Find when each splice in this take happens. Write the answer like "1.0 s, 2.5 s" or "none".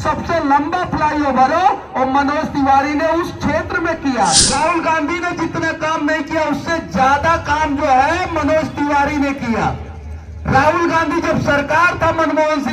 4.4 s